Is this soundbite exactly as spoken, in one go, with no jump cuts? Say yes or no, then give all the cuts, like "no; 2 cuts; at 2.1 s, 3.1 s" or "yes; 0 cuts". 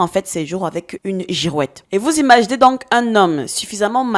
no; 1 cut; at 1.8 s